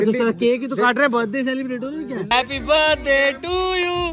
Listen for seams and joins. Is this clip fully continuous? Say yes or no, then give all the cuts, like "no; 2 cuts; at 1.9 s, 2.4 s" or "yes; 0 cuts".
no; 1 cut; at 2.3 s